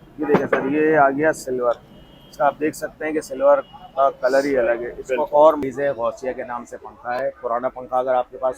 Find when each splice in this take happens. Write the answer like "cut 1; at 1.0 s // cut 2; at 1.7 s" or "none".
cut 1; at 5.6 s